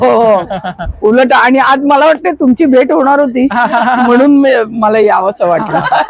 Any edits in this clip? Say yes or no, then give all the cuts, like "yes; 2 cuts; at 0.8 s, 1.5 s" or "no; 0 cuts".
no; 0 cuts